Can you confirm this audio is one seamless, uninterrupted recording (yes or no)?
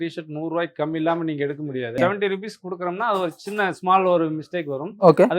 no